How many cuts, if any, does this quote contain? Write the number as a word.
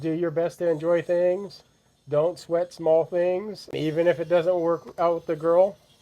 one